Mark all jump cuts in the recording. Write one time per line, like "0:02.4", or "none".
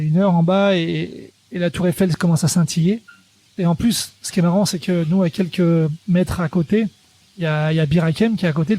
0:03.5